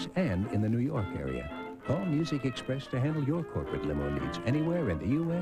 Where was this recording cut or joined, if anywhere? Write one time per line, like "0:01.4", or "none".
0:04.1